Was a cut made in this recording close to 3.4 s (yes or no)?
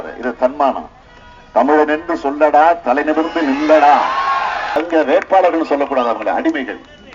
no